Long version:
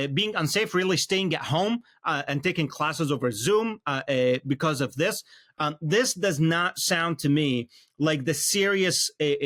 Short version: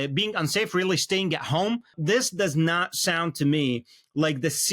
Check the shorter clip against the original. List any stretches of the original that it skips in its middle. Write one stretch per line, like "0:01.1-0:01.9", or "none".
0:01.9-0:05.8

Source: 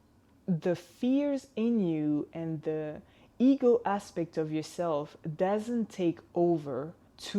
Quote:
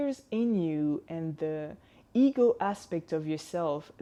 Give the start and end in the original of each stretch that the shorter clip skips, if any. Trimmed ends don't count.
none

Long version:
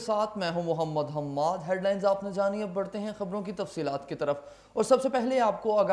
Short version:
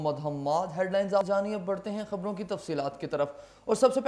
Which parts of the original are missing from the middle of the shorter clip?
0:02.1-0:02.3

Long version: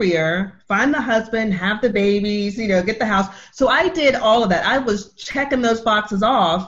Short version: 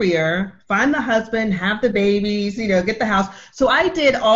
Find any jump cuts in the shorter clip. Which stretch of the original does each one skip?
none

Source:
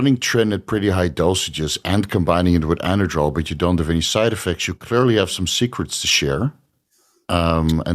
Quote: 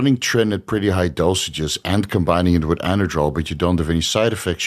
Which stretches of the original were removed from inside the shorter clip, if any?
none

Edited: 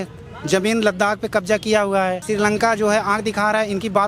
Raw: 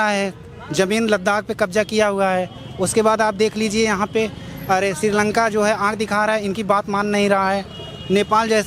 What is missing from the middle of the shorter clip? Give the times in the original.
0:02.5-0:05.0

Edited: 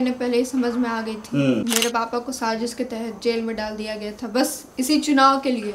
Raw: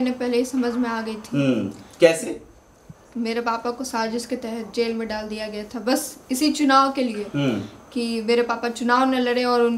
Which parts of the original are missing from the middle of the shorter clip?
0:01.6-0:03.2

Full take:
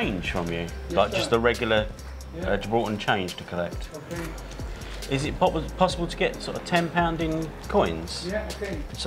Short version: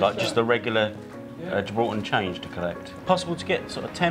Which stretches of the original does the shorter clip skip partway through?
0:03.9-0:05.7

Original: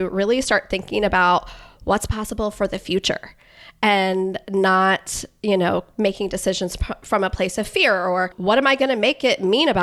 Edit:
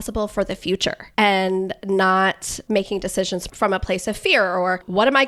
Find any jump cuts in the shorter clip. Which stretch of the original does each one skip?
0:03.3-0:03.7
0:05.2-0:05.9
0:06.8-0:07.0

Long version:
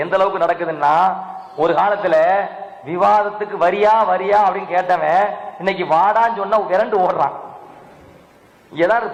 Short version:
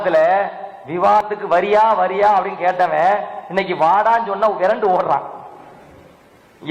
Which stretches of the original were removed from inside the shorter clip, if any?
0:03.2-0:03.3

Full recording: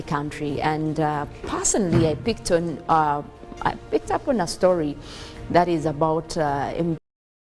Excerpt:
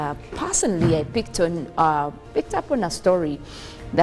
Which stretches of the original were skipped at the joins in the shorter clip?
0:03.4-0:03.8

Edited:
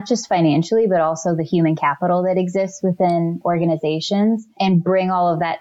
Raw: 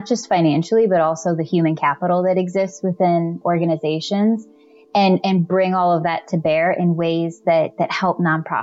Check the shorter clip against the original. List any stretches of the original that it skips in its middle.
0:04.6-0:05.2

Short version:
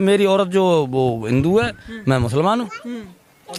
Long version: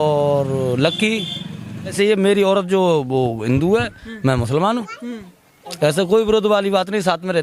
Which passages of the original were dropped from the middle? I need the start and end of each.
none

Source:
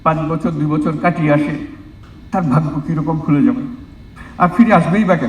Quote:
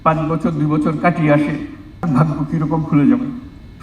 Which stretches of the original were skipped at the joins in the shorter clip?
0:02.1-0:02.4

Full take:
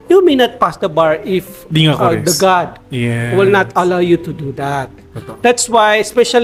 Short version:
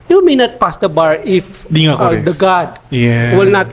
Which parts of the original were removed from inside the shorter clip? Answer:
none

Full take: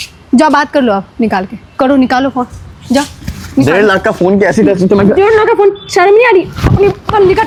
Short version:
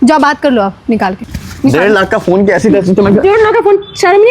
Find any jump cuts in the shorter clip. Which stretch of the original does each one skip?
0:01.6-0:03.2

